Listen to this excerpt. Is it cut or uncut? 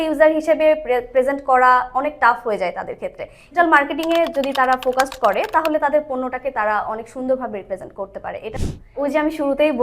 cut